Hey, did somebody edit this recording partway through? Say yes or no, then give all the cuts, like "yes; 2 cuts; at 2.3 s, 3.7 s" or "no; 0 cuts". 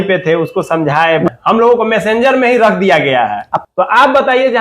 yes; 2 cuts; at 1.3 s, 3.5 s